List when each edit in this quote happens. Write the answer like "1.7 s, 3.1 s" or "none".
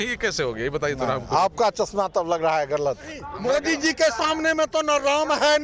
3.3 s